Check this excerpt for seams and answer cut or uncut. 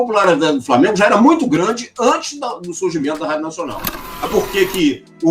cut